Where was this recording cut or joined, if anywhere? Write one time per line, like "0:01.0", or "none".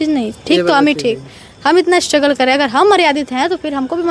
none

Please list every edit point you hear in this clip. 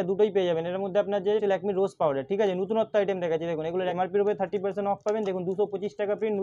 0:01.4
0:03.9

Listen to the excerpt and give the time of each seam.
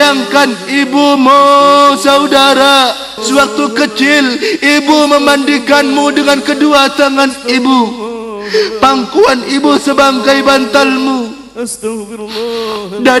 0:03.2

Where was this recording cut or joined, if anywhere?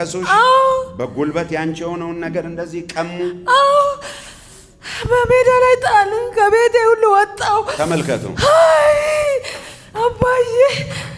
none

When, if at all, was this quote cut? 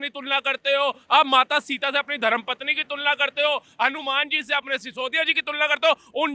none

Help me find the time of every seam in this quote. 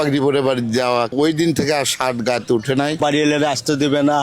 0:01.1
0:03.0

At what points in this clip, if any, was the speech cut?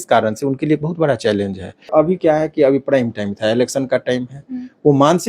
0:01.9

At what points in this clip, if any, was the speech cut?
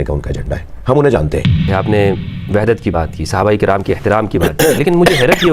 0:01.7

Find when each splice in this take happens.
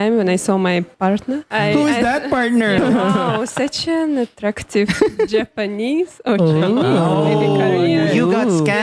0:01.1
0:02.8

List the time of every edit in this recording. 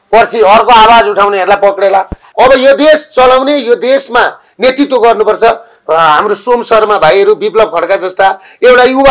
0:02.2

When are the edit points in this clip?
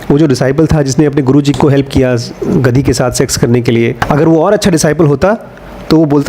0:01.5

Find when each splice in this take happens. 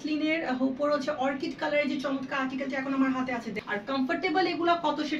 0:03.7

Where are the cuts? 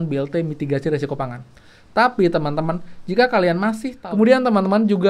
0:03.9

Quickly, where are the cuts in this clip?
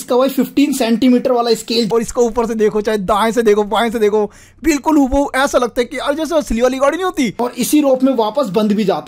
0:01.9
0:07.4

